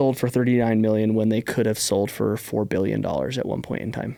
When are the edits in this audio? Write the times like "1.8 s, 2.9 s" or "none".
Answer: none